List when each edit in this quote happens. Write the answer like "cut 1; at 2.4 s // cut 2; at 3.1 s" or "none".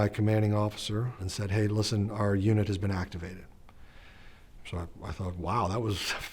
cut 1; at 1.3 s